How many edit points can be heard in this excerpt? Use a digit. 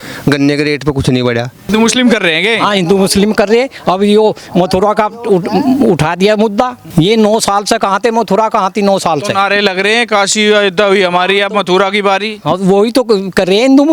2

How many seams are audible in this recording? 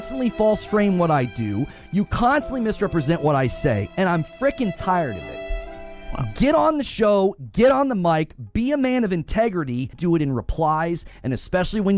1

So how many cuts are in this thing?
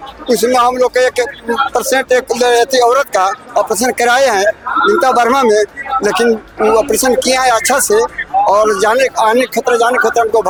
0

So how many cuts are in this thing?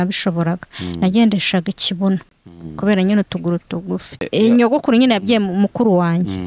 1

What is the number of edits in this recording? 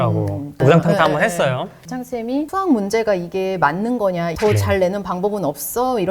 2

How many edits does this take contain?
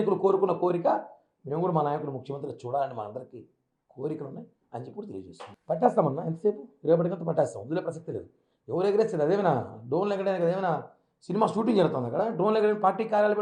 1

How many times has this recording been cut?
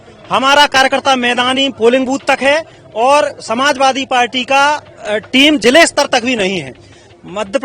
0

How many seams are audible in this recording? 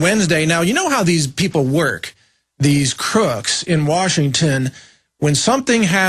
0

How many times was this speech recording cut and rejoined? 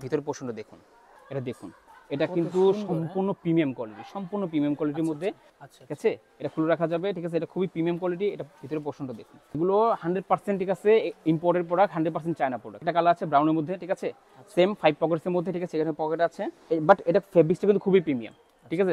5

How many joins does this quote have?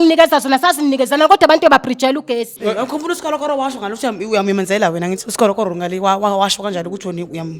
1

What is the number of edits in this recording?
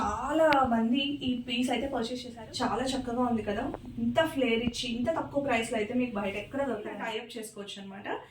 2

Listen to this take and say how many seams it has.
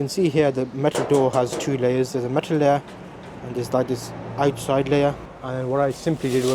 1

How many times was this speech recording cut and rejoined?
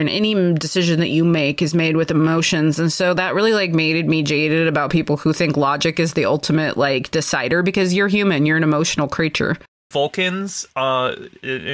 1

